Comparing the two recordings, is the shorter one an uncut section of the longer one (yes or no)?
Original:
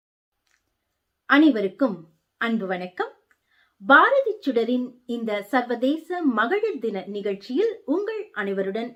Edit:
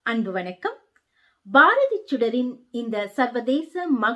yes